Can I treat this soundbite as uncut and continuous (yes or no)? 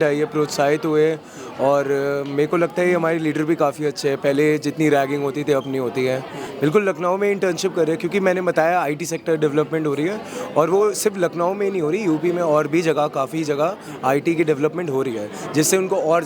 no